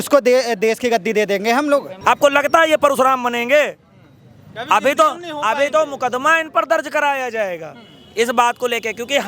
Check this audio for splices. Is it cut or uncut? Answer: cut